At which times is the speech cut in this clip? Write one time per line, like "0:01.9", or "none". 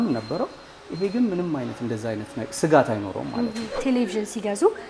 0:03.8